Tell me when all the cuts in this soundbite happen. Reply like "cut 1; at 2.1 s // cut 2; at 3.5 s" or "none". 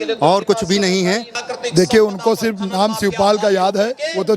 cut 1; at 1.4 s